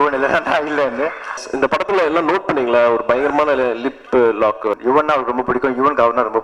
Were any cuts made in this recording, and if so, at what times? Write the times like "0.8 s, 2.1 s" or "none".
1.4 s, 4.8 s